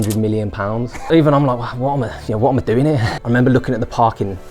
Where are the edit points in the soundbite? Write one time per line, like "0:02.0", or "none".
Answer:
0:01.0
0:03.1